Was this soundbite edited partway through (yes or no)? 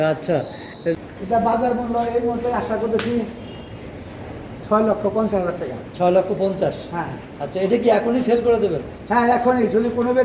yes